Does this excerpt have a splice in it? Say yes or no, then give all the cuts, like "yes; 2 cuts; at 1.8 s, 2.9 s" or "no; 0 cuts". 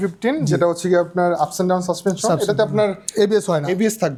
no; 0 cuts